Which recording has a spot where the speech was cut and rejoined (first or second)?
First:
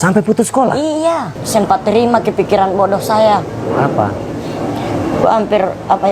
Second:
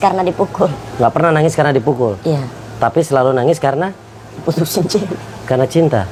first